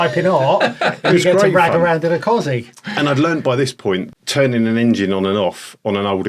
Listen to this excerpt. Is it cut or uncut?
cut